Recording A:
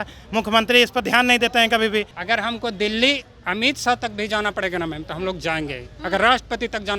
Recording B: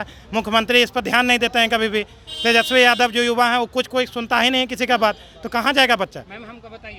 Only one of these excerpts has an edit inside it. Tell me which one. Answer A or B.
A